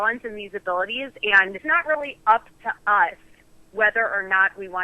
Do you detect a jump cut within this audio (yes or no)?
yes